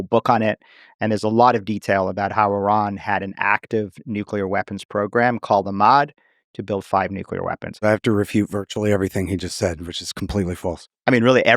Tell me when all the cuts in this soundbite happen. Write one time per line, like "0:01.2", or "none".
0:07.7